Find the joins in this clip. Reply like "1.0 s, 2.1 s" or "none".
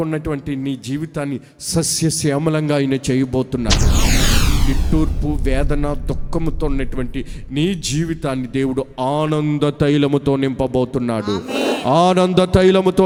none